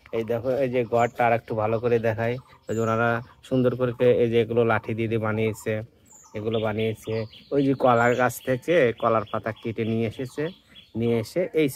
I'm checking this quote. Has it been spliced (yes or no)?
no